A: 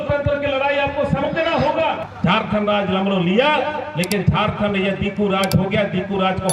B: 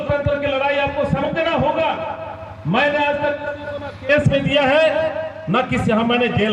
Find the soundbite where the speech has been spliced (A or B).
A